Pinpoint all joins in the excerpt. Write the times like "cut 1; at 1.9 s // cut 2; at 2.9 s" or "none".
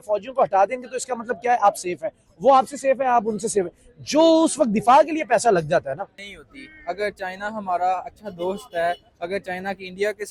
cut 1; at 6.2 s